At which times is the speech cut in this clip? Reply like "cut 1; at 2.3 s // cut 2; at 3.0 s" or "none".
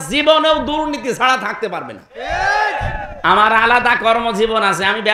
none